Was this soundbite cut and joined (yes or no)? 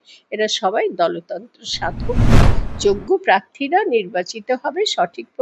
yes